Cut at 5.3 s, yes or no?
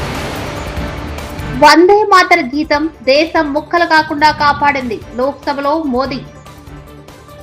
no